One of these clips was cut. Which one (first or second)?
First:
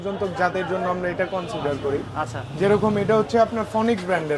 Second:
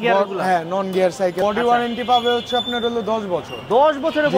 second